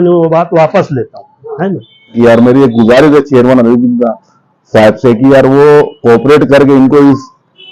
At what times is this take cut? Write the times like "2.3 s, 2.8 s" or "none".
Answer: 2.1 s